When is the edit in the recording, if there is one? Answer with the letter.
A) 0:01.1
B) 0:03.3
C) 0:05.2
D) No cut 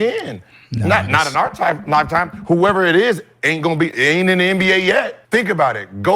C